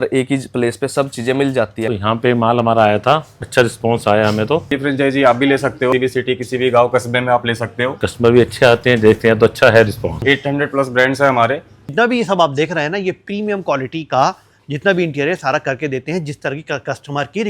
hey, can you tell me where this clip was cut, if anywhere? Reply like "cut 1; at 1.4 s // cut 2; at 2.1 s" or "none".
cut 1; at 1.9 s // cut 2; at 3.4 s // cut 3; at 4.7 s // cut 4; at 5.9 s // cut 5; at 8.0 s // cut 6; at 10.2 s // cut 7; at 11.9 s

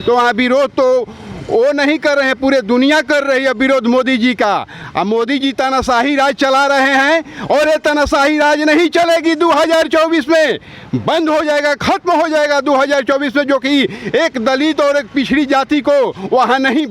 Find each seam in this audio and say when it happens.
none

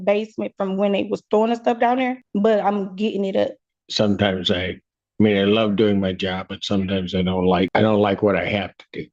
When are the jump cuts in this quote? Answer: cut 1; at 2.2 s // cut 2; at 3.8 s // cut 3; at 7.7 s

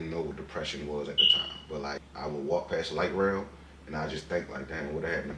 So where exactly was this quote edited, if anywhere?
cut 1; at 2.1 s

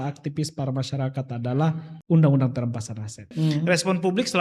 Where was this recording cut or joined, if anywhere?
cut 1; at 1.9 s // cut 2; at 3.3 s

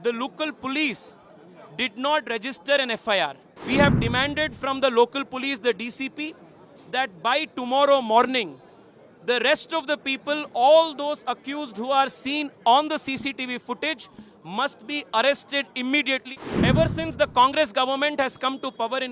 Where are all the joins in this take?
cut 1; at 3.5 s // cut 2; at 16.3 s

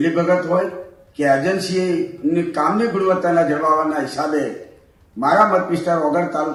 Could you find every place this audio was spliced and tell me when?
none

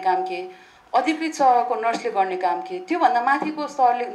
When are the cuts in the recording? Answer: none

